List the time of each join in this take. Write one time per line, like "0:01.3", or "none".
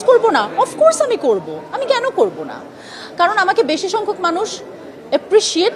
none